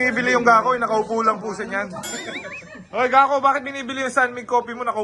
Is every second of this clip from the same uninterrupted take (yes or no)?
yes